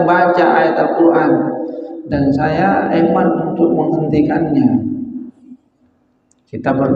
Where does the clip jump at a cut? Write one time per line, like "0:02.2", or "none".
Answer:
none